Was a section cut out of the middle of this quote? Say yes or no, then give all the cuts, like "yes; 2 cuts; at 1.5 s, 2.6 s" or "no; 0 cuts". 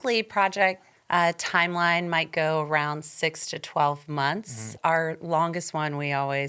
yes; 2 cuts; at 0.9 s, 4.6 s